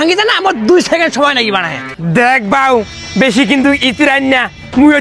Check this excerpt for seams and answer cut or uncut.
cut